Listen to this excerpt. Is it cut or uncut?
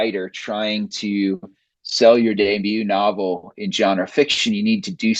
uncut